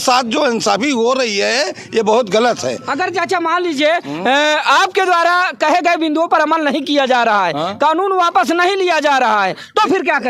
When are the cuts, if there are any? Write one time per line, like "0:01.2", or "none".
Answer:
none